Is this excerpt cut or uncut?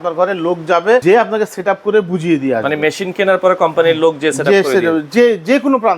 cut